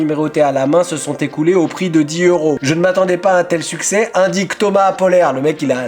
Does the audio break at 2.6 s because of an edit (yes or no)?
yes